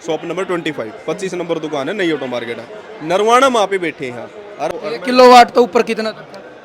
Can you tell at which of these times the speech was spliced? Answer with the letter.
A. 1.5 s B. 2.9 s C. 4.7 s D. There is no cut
C